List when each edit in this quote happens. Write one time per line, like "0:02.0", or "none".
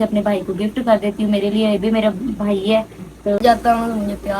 0:03.4